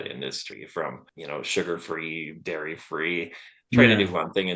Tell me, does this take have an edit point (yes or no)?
yes